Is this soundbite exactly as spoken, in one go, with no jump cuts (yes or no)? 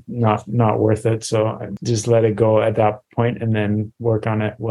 no